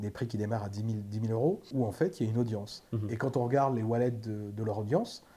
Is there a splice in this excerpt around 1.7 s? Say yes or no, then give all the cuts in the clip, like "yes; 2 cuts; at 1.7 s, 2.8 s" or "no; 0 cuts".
yes; 1 cut; at 1.7 s